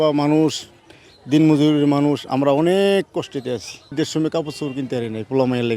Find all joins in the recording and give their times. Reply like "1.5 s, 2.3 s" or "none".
3.9 s